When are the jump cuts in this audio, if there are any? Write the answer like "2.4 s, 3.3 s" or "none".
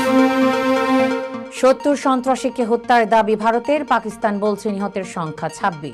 1.3 s

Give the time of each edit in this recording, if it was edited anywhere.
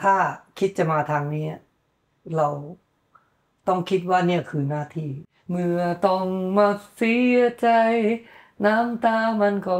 5.2 s

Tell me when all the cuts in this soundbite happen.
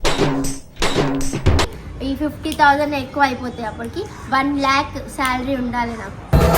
1.7 s

